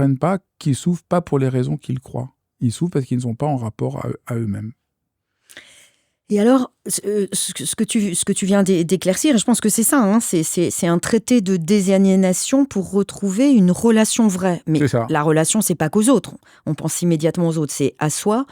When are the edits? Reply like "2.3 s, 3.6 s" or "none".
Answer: none